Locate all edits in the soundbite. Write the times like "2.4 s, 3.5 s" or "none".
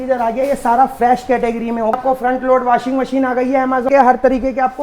1.9 s, 3.9 s